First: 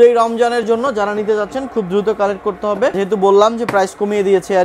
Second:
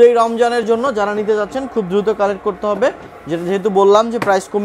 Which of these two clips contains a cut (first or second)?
first